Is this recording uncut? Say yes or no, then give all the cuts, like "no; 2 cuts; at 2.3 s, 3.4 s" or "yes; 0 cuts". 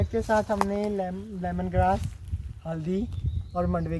yes; 0 cuts